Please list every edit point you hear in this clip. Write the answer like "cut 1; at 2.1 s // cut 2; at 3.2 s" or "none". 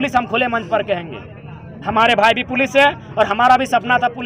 none